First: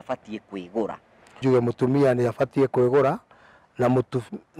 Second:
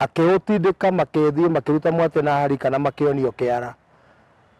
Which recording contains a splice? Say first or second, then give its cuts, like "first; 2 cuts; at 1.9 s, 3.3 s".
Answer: first; 1 cut; at 1.4 s